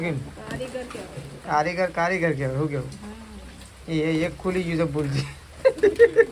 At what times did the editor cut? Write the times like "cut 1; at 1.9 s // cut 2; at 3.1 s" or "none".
none

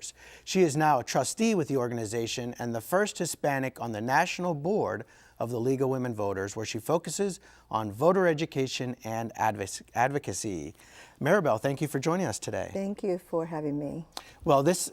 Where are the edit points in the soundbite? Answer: cut 1; at 13.9 s

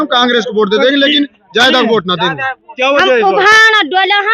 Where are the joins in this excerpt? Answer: cut 1; at 2.6 s

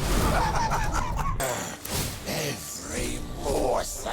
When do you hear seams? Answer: cut 1; at 1.4 s

